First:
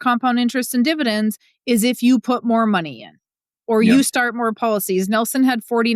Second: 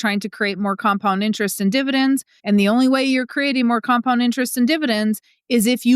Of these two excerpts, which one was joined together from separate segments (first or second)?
second